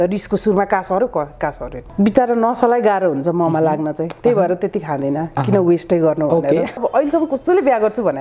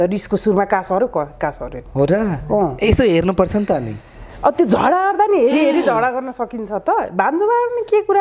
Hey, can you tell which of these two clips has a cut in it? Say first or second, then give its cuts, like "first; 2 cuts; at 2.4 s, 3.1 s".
first; 2 cuts; at 1.8 s, 6.8 s